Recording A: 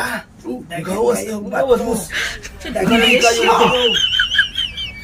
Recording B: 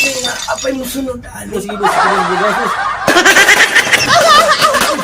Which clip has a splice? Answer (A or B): B